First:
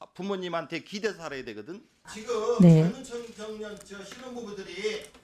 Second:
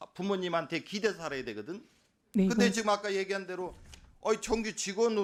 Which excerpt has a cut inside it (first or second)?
first